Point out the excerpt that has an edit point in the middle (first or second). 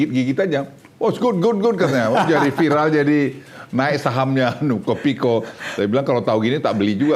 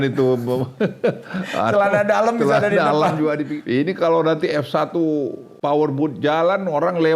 second